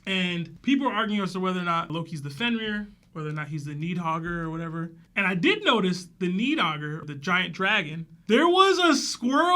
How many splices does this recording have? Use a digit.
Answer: 1